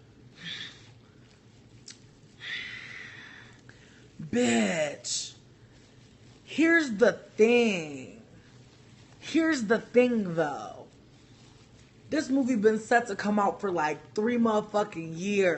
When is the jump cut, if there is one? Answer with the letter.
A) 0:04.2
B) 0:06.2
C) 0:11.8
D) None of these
D